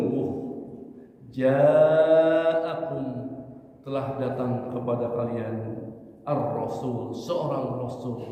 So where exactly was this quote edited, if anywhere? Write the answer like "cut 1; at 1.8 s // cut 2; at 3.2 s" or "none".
none